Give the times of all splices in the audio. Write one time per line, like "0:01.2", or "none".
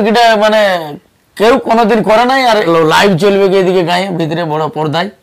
0:02.7